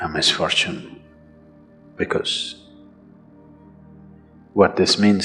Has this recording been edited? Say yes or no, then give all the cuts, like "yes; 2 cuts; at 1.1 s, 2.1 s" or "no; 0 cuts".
no; 0 cuts